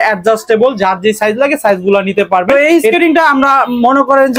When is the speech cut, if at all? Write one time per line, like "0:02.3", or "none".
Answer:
0:02.5